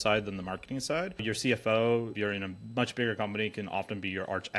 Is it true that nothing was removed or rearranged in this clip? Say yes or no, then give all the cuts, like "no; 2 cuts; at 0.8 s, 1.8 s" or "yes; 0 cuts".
no; 2 cuts; at 1.2 s, 2.1 s